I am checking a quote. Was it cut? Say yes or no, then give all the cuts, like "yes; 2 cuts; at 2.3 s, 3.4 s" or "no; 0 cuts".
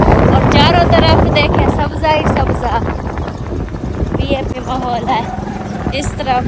no; 0 cuts